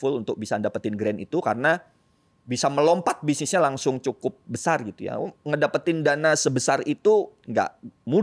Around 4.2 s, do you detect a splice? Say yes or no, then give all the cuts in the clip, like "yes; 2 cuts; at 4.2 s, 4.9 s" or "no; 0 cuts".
no; 0 cuts